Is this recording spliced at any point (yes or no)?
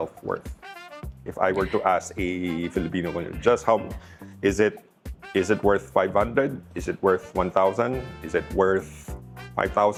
no